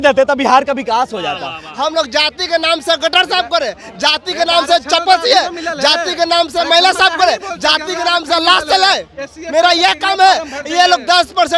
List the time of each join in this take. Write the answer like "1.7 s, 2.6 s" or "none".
1.6 s

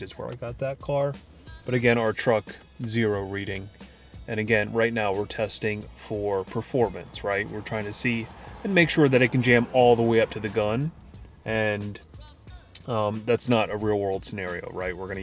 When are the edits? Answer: none

